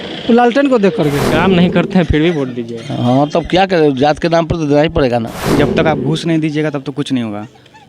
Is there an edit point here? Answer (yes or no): yes